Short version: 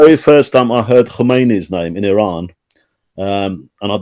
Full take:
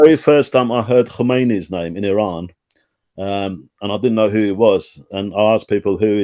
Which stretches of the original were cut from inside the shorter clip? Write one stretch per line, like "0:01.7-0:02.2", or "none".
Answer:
none